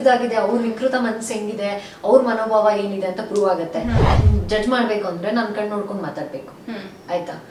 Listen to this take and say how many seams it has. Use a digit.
1